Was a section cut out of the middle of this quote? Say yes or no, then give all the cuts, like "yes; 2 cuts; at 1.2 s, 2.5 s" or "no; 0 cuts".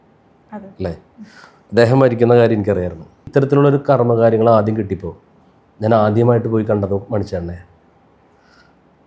yes; 1 cut; at 3.2 s